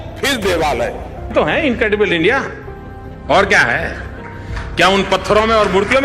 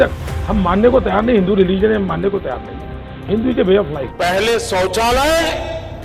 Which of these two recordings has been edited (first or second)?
first